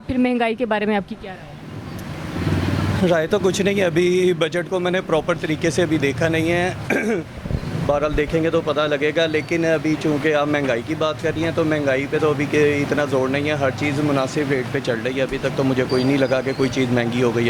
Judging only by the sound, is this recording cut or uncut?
uncut